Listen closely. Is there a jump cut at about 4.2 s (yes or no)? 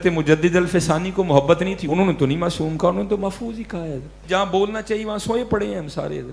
yes